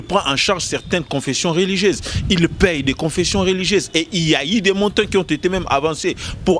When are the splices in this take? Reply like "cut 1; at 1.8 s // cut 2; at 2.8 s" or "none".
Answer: none